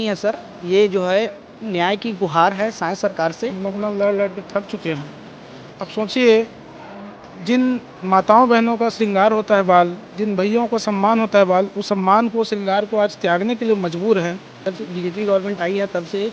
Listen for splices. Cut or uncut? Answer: cut